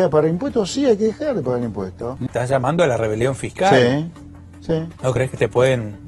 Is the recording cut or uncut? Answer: cut